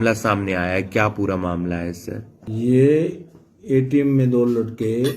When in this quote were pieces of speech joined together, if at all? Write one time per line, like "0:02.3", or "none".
0:02.4